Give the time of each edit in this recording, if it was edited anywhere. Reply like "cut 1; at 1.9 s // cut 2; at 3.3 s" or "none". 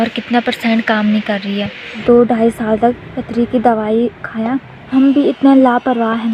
cut 1; at 2.0 s // cut 2; at 4.8 s